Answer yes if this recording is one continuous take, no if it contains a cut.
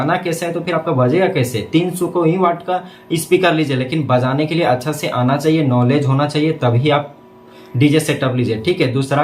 yes